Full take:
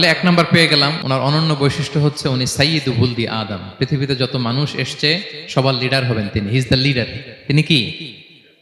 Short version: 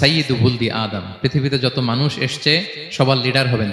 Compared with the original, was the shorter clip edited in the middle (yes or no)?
no